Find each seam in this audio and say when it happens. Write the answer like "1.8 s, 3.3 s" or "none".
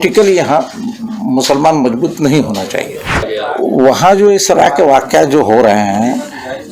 3.2 s